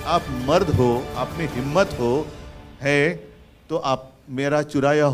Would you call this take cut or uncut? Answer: uncut